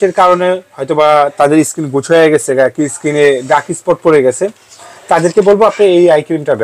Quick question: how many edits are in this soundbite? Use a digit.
0